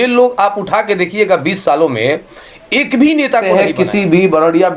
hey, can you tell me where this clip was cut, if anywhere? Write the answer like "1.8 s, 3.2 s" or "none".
3.5 s